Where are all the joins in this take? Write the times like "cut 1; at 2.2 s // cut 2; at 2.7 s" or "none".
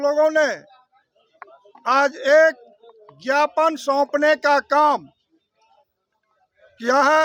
none